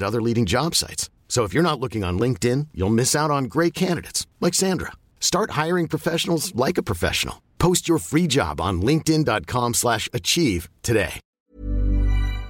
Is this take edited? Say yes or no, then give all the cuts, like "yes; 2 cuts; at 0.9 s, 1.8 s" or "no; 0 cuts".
yes; 1 cut; at 11.3 s